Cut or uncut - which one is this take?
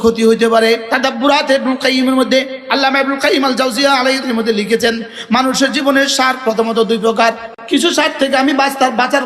cut